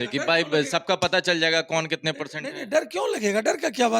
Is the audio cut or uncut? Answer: uncut